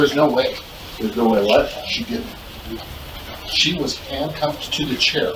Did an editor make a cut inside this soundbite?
no; 0 cuts

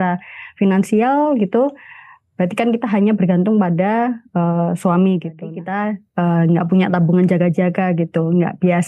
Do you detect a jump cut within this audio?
yes; 1 cut; at 5.5 s

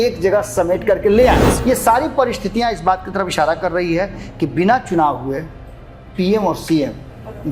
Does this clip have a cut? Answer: yes; 1 cut; at 1.5 s

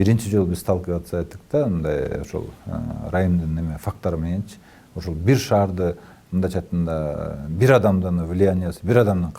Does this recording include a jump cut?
no; 0 cuts

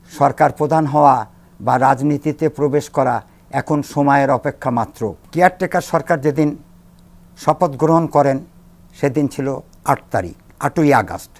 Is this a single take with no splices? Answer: no; 1 cut; at 5.2 s

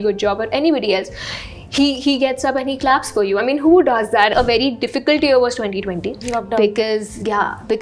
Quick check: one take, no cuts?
no; 1 cut; at 4.3 s

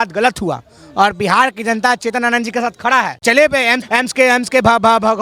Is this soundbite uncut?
no; 2 cuts; at 3.2 s, 3.8 s

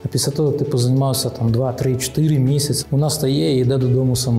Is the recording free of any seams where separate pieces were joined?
no; 1 cut; at 2.8 s

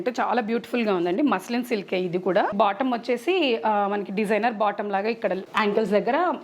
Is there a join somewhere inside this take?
yes; 2 cuts; at 2.5 s, 5.4 s

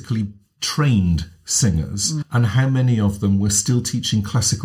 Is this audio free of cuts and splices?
no; 1 cut; at 2.2 s

